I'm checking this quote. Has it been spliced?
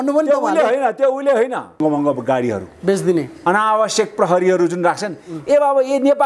yes; 1 cut; at 1.8 s

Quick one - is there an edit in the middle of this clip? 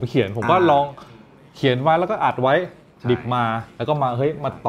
no; 0 cuts

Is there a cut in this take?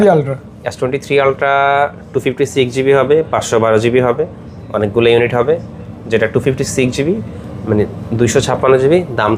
no; 0 cuts

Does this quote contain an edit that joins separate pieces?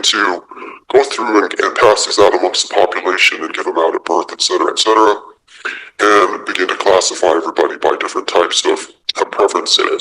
no; 0 cuts

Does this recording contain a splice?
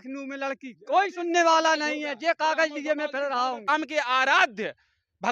yes; 1 cut; at 3.7 s

